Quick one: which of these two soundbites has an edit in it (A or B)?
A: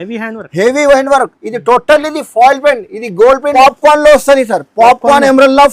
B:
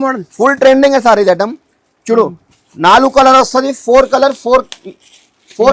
A